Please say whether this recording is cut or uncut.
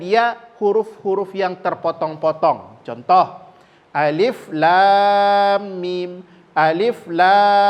uncut